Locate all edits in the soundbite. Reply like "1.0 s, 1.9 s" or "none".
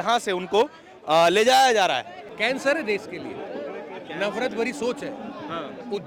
2.2 s